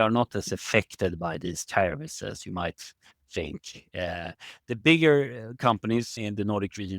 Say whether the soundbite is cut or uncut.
cut